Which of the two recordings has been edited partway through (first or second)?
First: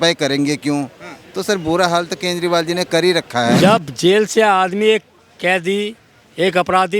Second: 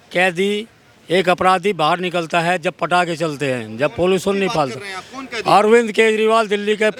first